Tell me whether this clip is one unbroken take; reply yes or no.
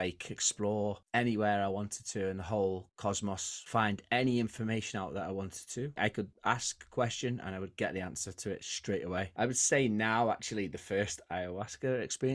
no